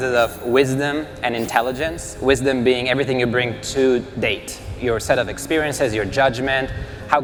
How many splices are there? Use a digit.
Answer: 0